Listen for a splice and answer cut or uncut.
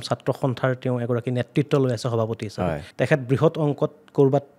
cut